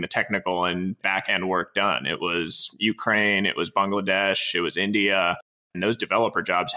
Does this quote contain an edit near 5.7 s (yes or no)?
yes